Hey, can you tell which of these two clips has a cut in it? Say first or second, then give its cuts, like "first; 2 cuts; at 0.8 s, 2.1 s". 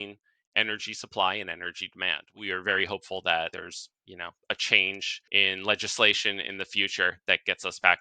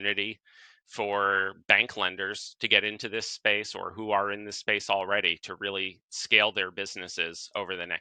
first; 3 cuts; at 2.3 s, 3.5 s, 5.1 s